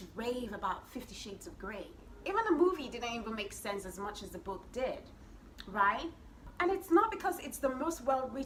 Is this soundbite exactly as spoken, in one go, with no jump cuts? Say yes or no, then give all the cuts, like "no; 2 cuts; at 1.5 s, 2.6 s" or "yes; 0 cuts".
yes; 0 cuts